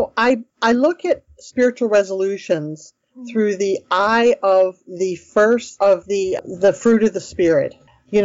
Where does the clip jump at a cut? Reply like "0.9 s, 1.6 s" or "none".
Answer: 6.4 s